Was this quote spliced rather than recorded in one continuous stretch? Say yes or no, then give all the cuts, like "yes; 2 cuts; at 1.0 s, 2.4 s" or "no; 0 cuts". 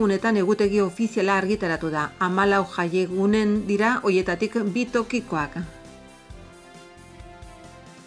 yes; 1 cut; at 5.7 s